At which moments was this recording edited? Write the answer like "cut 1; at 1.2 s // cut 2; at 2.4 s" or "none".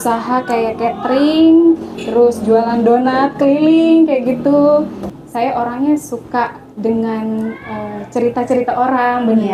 cut 1; at 5.1 s